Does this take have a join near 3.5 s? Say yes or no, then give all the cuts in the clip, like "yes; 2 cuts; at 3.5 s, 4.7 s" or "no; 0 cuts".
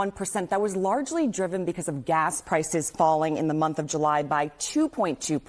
no; 1 cut; at 2.2 s